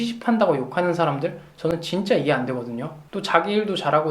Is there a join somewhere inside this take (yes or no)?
yes